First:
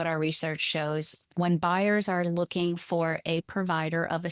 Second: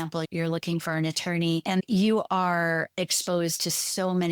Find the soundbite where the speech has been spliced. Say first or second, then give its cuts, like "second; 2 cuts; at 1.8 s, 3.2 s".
second; 1 cut; at 1.6 s